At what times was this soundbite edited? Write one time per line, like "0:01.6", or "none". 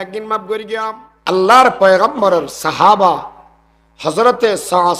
0:01.3